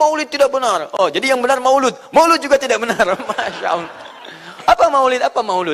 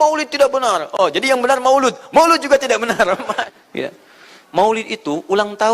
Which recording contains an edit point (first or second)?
second